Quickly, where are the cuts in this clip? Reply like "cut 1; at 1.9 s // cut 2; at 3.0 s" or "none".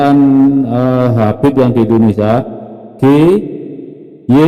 none